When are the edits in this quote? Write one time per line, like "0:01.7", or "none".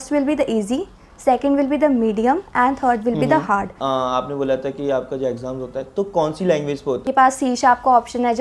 0:03.7
0:07.0